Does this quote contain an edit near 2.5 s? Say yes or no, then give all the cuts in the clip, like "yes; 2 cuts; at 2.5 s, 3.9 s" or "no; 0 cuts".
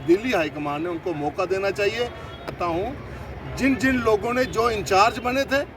yes; 1 cut; at 2.5 s